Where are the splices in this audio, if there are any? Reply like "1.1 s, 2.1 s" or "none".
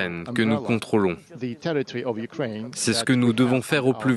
1.9 s

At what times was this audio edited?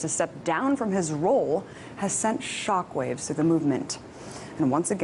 1.1 s

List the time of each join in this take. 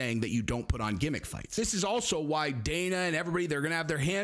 1.6 s

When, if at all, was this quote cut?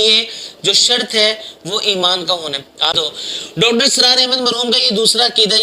3.0 s

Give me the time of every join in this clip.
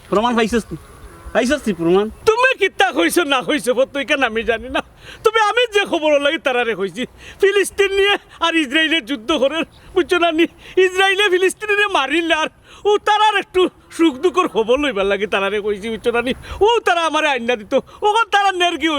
none

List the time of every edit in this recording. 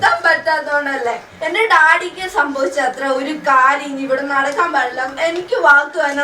1.3 s, 5.1 s

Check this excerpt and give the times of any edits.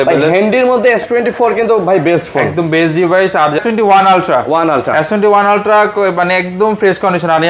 3.6 s

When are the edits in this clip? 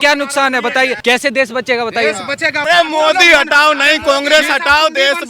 1.0 s, 2.6 s

